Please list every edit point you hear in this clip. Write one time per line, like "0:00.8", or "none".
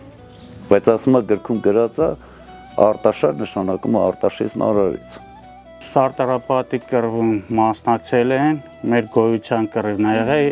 0:05.7